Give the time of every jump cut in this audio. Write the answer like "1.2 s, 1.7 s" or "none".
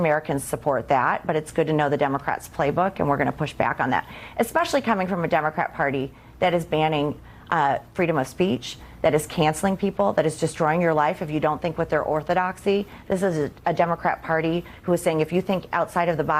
4.2 s